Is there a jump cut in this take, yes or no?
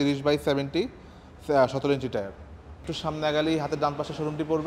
yes